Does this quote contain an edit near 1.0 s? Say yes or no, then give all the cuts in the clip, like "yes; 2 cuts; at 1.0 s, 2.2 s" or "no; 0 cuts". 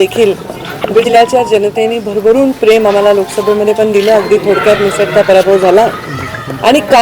yes; 1 cut; at 1.0 s